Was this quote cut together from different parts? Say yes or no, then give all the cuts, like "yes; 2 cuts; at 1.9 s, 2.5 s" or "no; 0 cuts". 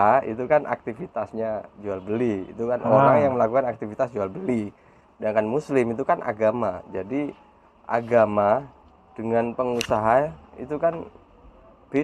no; 0 cuts